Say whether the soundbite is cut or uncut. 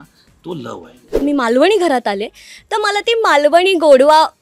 cut